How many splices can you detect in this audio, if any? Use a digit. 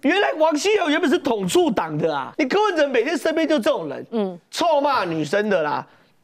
1